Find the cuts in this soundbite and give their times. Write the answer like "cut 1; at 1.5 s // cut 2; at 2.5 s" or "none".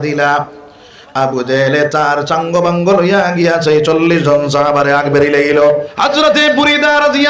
cut 1; at 5.9 s